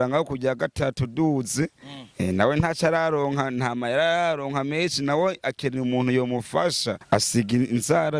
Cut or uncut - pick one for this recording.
cut